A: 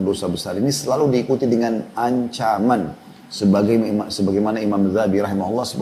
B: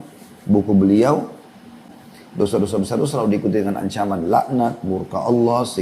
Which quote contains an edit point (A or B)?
B